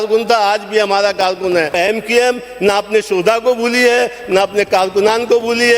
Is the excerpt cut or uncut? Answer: cut